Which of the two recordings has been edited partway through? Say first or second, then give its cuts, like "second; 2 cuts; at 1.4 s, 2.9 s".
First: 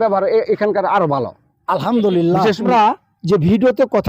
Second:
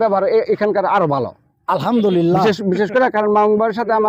first; 1 cut; at 2.7 s